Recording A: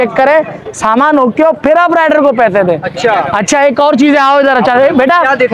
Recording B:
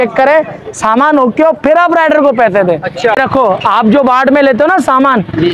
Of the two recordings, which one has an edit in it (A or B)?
B